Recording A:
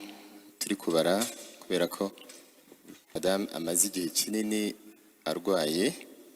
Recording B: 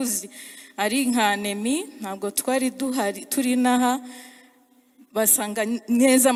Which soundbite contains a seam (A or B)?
A